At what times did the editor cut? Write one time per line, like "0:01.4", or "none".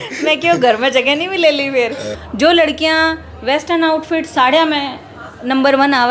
0:02.2